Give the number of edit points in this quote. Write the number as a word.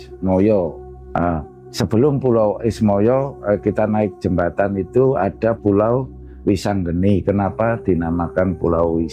zero